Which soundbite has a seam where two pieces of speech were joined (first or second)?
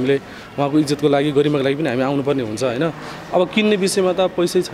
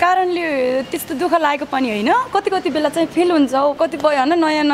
second